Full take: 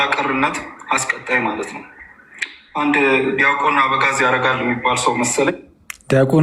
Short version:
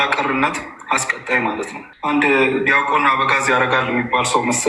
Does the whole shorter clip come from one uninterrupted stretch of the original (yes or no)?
no